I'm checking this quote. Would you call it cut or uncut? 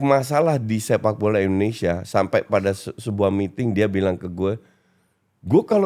uncut